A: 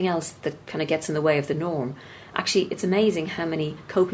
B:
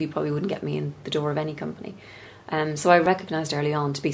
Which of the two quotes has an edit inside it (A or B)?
B